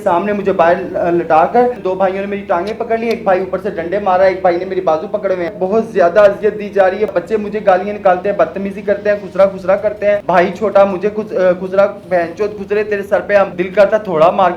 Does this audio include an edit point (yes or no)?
yes